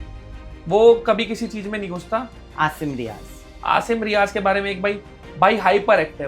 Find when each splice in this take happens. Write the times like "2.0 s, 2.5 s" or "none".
2.4 s

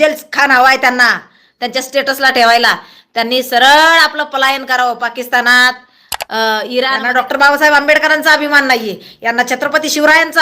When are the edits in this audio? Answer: 7.0 s

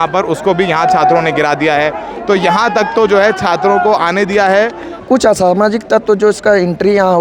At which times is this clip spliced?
4.9 s

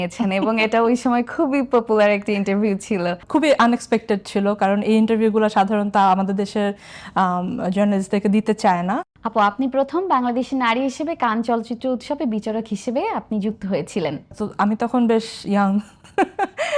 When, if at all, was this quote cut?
3.2 s, 9.1 s, 14.3 s

